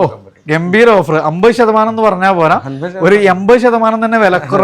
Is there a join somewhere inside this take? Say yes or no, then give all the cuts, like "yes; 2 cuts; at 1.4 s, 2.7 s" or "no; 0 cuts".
no; 0 cuts